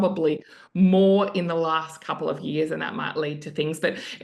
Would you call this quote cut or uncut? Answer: uncut